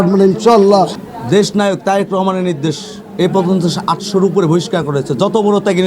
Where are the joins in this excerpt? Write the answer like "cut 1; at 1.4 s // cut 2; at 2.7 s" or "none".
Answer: cut 1; at 1.0 s